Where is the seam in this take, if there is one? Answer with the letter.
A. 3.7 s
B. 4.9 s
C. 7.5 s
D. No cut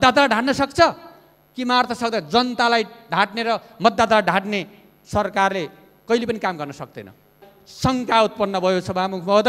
C